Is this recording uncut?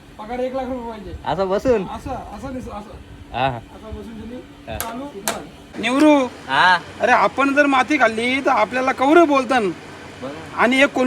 no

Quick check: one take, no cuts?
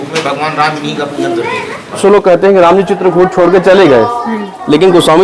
no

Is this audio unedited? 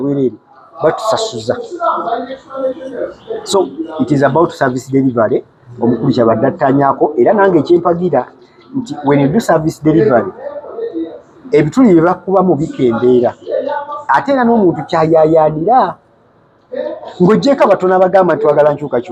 yes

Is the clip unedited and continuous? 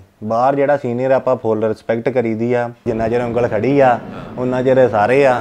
no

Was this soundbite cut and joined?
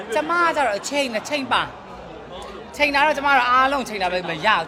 no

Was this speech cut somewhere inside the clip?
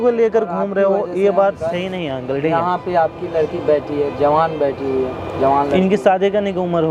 no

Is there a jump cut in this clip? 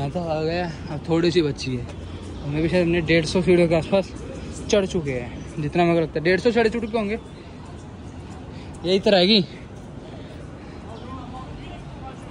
no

